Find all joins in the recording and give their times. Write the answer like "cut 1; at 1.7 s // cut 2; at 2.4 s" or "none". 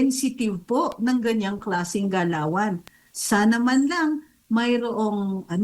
none